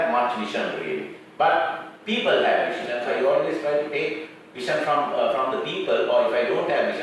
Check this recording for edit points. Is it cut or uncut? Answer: cut